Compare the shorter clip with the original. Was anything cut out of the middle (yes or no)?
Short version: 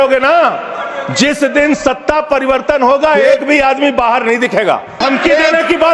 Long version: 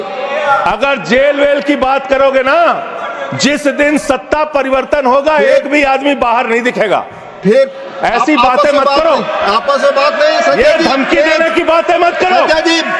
yes